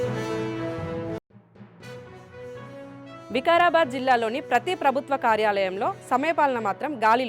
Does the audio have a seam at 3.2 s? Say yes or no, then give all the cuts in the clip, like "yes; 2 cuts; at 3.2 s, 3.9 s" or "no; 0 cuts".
yes; 1 cut; at 3.2 s